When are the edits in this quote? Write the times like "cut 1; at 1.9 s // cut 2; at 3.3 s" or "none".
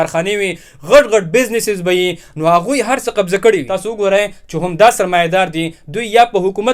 cut 1; at 3.8 s